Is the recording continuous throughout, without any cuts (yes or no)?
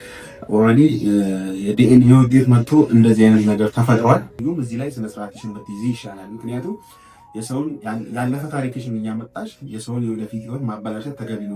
no